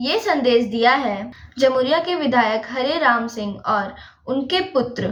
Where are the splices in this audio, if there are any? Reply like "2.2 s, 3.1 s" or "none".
none